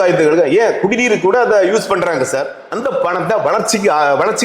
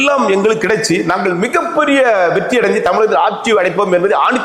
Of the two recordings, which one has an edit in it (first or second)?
first